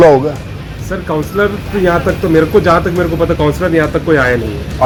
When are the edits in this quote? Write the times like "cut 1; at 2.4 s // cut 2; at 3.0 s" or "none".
none

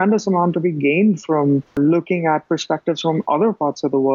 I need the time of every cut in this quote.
none

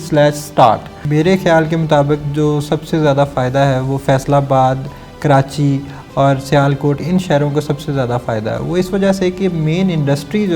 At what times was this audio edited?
cut 1; at 1.0 s

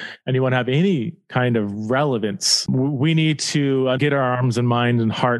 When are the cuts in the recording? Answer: cut 1; at 2.6 s // cut 2; at 4.0 s

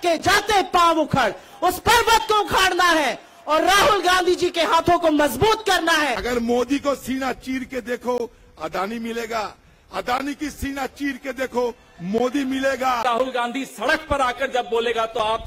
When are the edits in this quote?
cut 1; at 6.2 s // cut 2; at 13.0 s

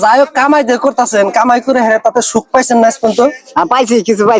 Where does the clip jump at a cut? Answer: none

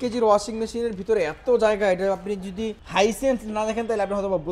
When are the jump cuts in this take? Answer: cut 1; at 2.8 s

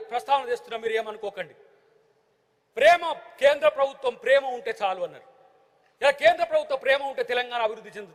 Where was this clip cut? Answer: none

